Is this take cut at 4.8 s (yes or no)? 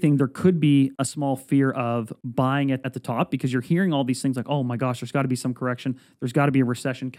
no